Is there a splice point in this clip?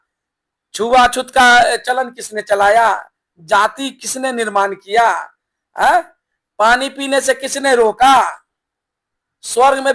no; 0 cuts

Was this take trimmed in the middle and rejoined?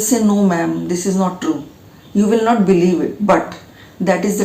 no; 0 cuts

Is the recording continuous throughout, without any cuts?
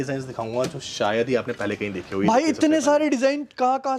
yes; 0 cuts

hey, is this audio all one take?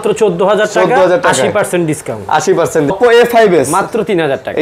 no; 1 cut; at 2.9 s

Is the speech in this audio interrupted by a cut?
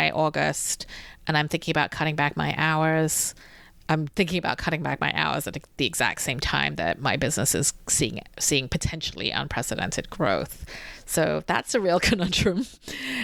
no; 0 cuts

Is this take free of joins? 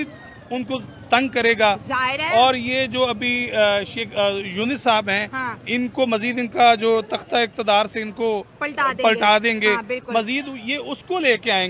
yes; 0 cuts

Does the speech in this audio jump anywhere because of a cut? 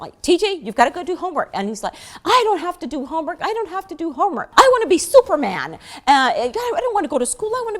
yes; 1 cut; at 4.4 s

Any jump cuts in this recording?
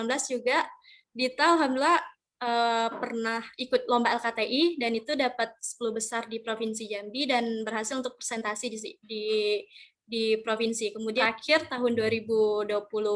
yes; 1 cut; at 11.2 s

